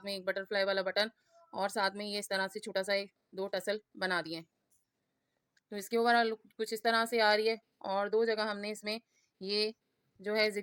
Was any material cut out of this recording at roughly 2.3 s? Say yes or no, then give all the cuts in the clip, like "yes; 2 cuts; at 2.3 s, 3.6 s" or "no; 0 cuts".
no; 0 cuts